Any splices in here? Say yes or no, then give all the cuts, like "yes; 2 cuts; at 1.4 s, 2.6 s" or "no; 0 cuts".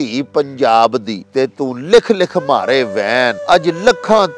yes; 2 cuts; at 1.2 s, 3.4 s